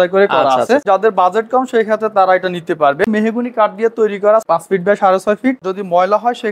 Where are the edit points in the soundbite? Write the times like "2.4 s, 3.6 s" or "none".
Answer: 0.8 s, 3.1 s, 4.4 s, 5.6 s